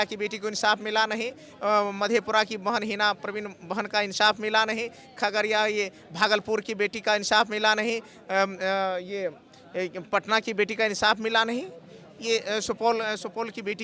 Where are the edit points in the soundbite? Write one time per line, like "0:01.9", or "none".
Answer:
none